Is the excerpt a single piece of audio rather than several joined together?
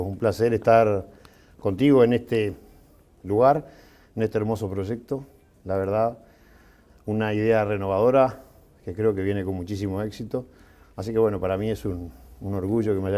no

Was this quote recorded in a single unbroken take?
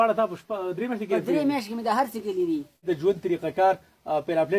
no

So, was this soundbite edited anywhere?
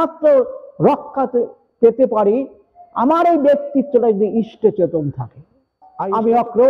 yes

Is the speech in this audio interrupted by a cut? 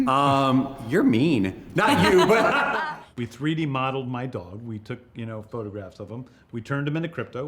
yes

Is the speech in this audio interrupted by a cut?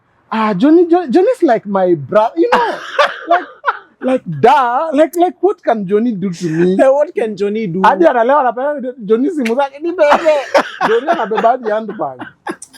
no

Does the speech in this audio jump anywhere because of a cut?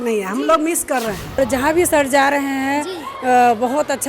yes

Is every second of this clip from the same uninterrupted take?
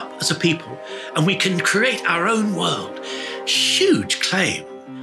yes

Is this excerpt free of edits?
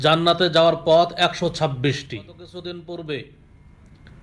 no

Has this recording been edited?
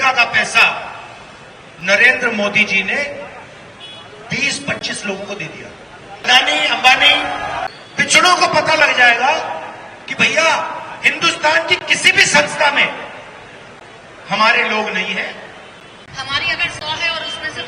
yes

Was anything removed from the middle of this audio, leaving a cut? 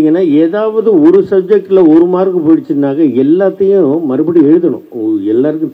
no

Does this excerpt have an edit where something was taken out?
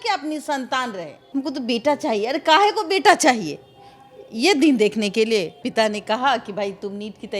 yes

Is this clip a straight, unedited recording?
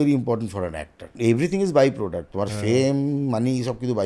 no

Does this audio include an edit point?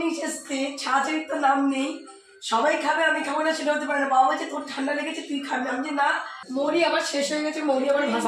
yes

